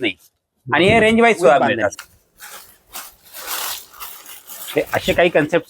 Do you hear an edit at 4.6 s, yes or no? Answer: no